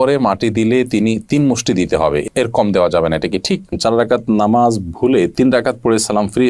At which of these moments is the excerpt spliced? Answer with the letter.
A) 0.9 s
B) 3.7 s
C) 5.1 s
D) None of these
B